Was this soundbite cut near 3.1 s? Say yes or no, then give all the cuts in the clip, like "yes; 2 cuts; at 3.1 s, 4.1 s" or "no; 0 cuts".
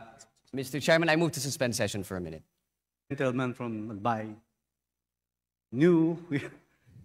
yes; 1 cut; at 3.1 s